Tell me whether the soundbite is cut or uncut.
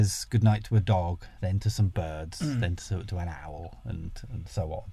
uncut